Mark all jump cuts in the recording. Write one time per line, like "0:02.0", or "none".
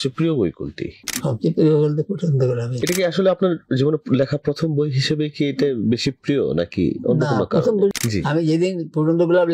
0:02.7
0:07.9

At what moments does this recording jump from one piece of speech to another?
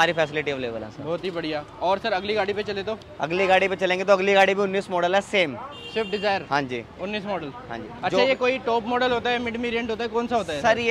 none

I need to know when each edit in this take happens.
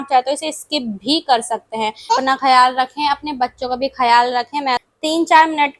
0:02.1
0:04.8

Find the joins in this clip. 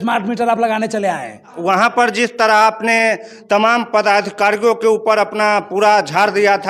0:01.6

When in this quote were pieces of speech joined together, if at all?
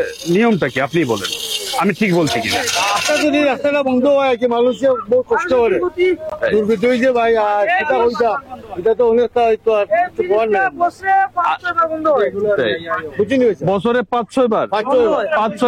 0:02.8

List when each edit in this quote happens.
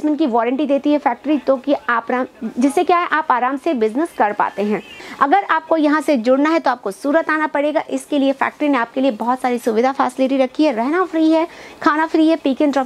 0:05.0

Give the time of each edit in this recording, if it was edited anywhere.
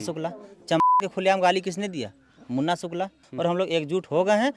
0:03.2

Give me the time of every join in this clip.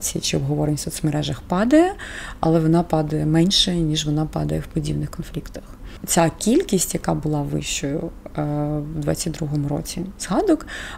0:05.9

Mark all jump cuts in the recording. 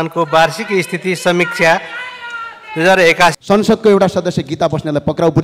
0:03.4

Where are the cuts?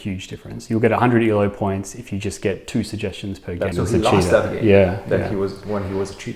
0:03.8

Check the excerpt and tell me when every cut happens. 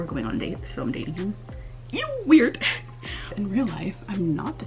0:03.2

